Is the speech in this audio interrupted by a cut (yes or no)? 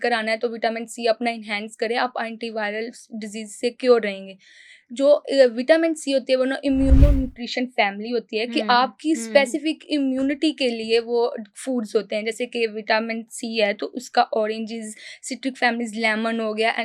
no